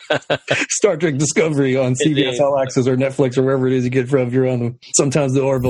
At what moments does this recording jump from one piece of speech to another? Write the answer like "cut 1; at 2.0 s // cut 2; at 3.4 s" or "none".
cut 1; at 4.8 s